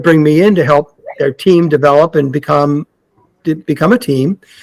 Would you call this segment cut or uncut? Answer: uncut